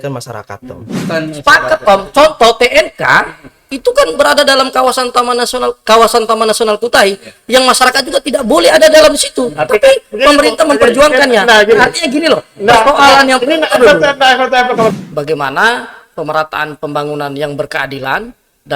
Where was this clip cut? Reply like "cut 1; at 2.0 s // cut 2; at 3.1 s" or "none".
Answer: cut 1; at 1.0 s // cut 2; at 14.9 s